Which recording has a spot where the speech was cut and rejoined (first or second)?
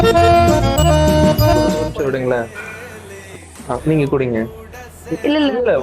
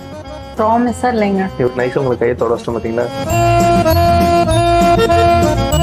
first